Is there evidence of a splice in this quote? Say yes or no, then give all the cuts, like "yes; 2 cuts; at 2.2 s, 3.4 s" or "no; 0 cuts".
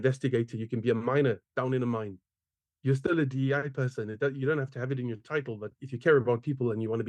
no; 0 cuts